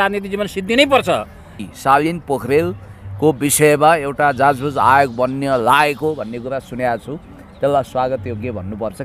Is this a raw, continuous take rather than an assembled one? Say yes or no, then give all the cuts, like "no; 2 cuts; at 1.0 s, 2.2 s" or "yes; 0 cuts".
no; 1 cut; at 1.6 s